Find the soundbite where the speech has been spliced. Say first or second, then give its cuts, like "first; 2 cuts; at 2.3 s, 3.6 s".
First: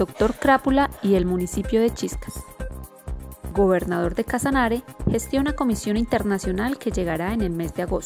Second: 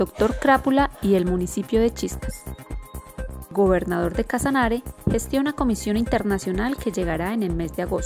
second; 2 cuts; at 2.1 s, 3.5 s